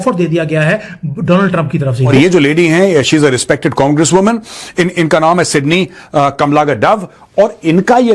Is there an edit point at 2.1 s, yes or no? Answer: yes